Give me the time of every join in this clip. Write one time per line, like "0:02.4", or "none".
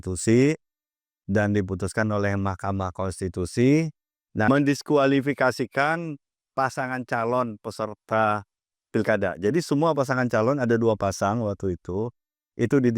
0:04.5